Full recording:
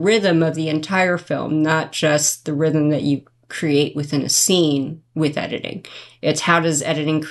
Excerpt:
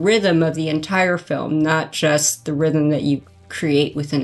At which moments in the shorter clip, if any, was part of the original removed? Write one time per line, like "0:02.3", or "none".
none